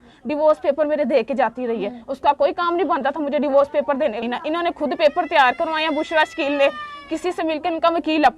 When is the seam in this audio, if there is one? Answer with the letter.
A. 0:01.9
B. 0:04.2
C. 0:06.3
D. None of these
B